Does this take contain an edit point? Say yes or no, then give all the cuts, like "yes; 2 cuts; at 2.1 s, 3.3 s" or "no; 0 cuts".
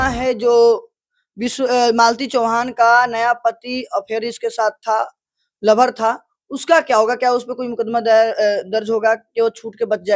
no; 0 cuts